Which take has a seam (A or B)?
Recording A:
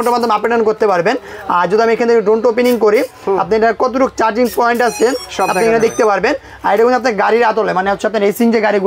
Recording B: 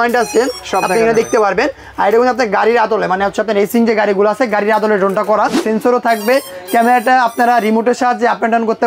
B